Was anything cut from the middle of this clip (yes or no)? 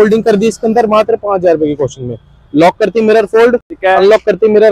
no